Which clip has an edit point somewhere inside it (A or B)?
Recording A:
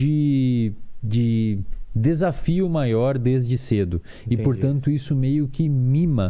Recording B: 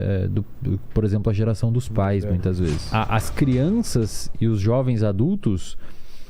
B